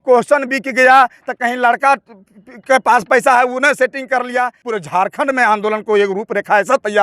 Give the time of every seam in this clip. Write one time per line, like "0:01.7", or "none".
0:04.6

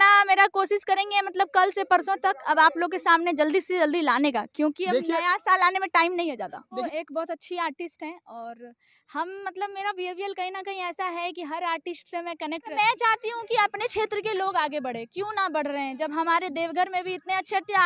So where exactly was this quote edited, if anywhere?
0:06.8
0:12.7

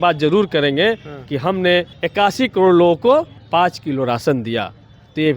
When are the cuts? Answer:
0:01.9
0:03.4

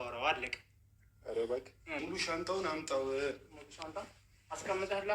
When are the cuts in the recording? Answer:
0:02.0

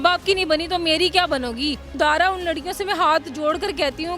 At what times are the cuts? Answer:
0:01.9

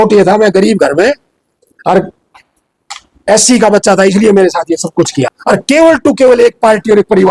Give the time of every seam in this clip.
0:05.3

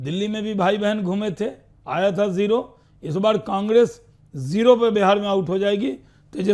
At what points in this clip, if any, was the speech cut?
none

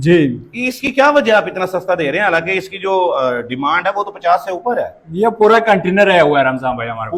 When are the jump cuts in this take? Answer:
none

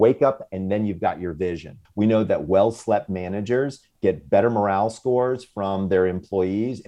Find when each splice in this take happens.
0:01.8
0:03.9

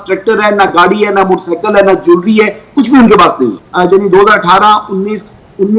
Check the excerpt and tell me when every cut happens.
0:03.6

